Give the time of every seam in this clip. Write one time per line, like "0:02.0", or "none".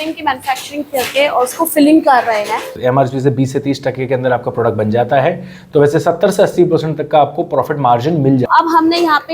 0:02.7
0:08.5